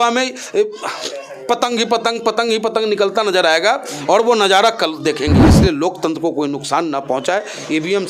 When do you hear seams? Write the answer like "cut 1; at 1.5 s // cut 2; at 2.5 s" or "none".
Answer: cut 1; at 5.4 s